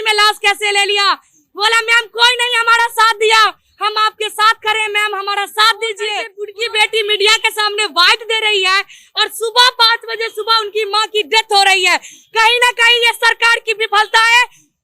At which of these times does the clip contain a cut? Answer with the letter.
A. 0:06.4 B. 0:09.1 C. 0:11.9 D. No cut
A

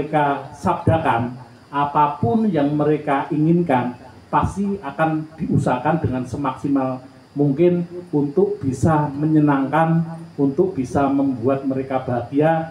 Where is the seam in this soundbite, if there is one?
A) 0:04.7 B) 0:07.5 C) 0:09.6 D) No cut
D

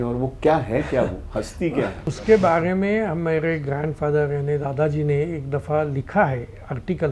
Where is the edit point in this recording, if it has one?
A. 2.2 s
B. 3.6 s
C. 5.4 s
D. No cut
A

